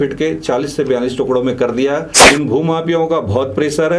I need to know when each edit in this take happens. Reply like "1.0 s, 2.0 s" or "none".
2.1 s